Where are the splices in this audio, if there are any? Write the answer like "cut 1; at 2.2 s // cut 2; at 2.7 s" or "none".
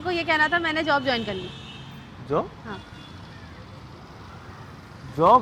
none